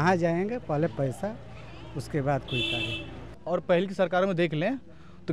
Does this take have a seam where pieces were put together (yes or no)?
yes